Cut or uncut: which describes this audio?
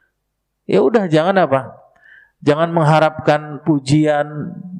uncut